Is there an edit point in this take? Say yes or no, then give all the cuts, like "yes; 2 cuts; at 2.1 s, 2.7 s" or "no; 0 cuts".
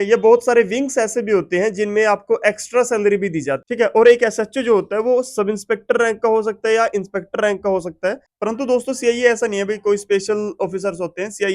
yes; 2 cuts; at 3.6 s, 8.2 s